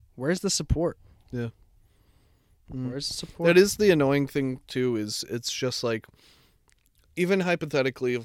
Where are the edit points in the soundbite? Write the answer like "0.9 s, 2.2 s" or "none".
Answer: none